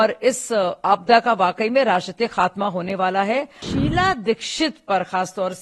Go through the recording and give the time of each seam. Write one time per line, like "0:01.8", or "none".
0:03.6